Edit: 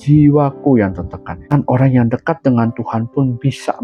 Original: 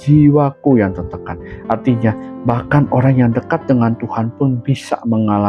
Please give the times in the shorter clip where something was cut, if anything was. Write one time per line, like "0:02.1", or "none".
0:01.4